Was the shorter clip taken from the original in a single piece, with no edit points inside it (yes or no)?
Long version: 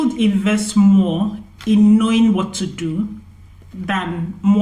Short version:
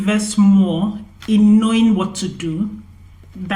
yes